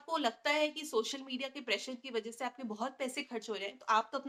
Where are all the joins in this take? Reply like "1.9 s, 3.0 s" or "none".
none

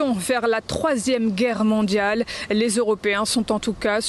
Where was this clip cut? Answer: none

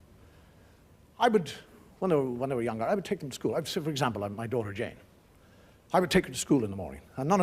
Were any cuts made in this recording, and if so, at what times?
6.0 s

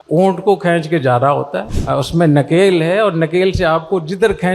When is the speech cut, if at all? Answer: 1.7 s

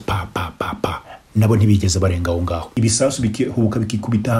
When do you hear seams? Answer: 2.8 s

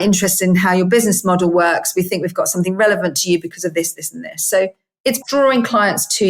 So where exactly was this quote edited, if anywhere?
5.1 s

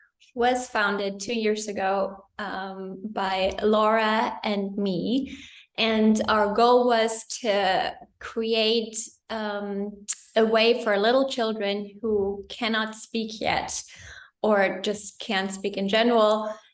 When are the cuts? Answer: none

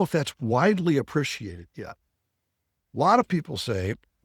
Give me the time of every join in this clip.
2.0 s

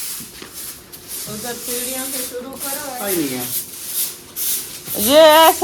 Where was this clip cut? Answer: 3.0 s

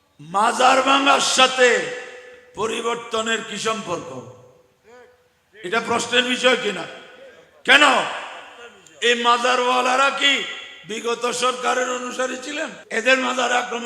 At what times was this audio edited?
12.8 s

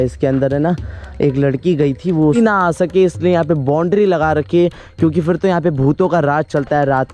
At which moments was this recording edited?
2.4 s

